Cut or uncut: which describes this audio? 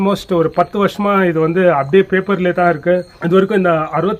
cut